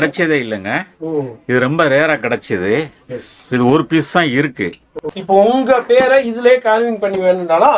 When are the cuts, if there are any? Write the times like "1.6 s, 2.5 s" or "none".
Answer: 4.9 s